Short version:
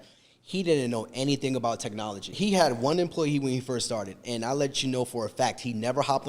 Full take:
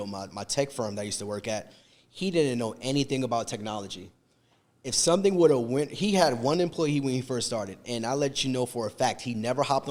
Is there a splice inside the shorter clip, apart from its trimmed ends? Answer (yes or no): yes